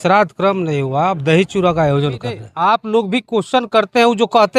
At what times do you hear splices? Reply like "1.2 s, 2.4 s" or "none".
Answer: 2.6 s